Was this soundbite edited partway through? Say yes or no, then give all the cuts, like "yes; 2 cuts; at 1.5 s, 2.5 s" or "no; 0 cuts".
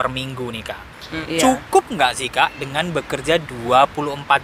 yes; 1 cut; at 1.1 s